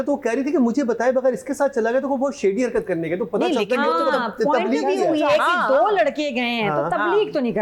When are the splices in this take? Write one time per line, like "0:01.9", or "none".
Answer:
none